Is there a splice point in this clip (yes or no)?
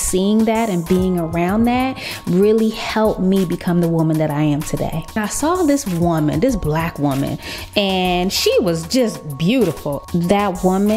yes